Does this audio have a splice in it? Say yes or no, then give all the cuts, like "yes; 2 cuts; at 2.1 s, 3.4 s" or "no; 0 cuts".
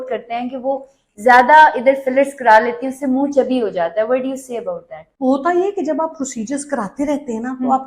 no; 0 cuts